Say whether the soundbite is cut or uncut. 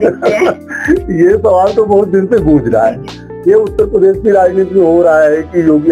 uncut